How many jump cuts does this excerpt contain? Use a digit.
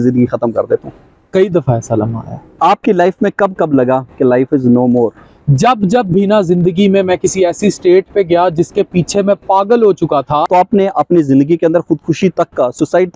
2